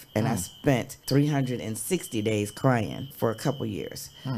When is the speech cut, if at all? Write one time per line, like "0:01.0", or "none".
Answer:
0:01.0
0:03.1